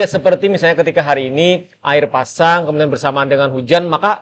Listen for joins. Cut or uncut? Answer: uncut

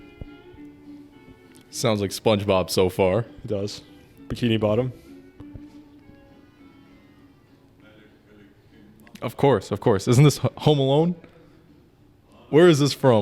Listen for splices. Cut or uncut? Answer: uncut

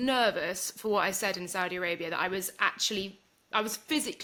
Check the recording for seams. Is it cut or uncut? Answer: uncut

